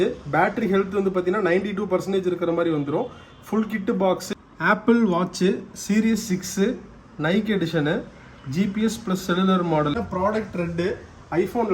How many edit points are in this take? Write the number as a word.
two